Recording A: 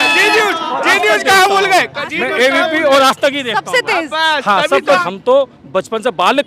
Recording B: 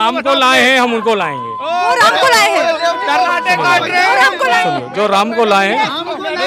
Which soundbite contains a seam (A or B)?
A